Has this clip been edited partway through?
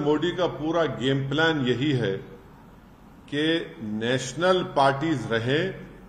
no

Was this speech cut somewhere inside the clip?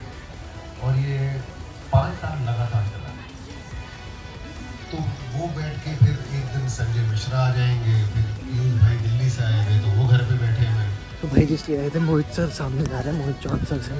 no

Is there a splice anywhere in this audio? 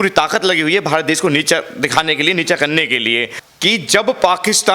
yes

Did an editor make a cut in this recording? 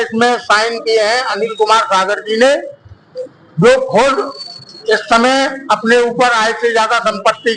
no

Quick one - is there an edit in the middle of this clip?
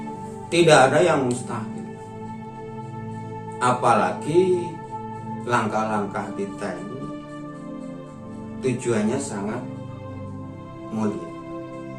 no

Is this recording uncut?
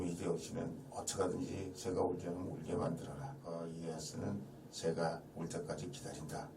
no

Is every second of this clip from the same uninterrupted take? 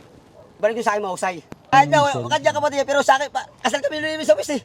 no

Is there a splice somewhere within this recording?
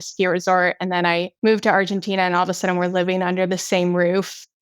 yes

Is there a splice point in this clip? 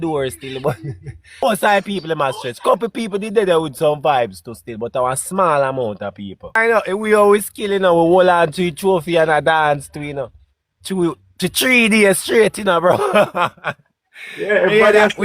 yes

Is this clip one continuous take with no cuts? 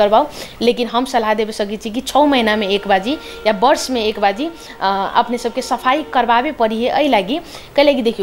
yes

